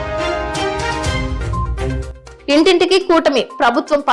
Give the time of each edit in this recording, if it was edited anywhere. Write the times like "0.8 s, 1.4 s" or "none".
1.8 s

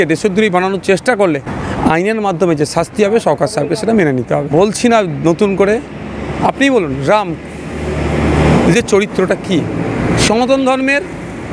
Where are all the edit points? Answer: none

